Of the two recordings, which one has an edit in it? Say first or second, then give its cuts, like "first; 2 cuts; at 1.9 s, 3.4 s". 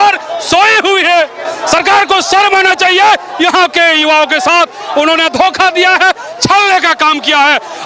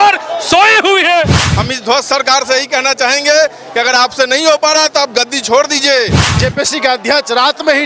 second; 2 cuts; at 1.4 s, 6.3 s